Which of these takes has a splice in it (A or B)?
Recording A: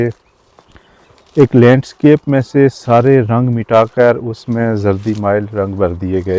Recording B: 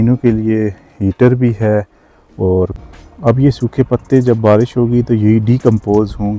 B